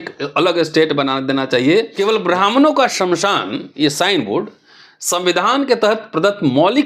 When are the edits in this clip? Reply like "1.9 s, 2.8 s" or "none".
1.9 s